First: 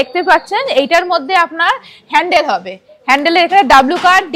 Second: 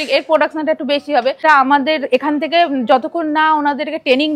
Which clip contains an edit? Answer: second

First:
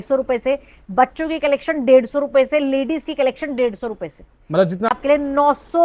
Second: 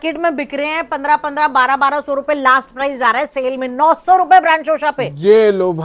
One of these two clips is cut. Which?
first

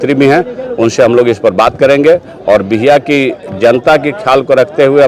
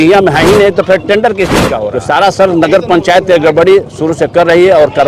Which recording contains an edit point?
second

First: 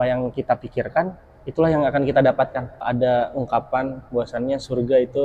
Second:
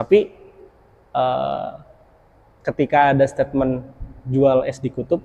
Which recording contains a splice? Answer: first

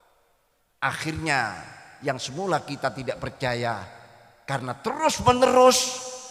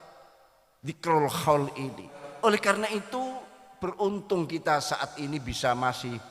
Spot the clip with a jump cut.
second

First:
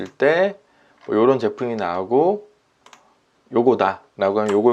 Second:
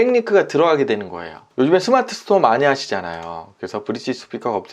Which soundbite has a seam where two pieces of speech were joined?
second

